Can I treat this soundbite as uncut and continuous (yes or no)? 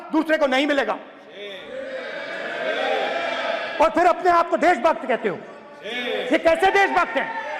yes